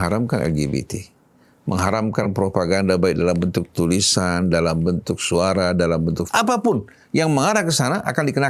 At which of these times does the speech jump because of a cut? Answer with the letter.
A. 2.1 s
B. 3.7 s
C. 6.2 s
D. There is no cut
C